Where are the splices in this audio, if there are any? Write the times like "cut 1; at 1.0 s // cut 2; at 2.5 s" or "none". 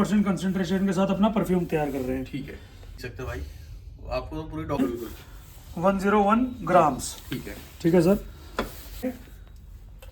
cut 1; at 3.0 s // cut 2; at 4.8 s // cut 3; at 9.2 s